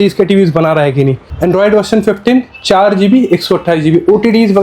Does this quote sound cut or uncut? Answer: cut